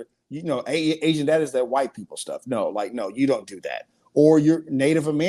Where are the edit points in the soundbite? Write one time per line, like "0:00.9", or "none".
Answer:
none